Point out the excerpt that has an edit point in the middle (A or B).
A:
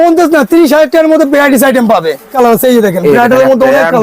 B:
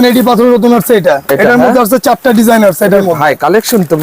A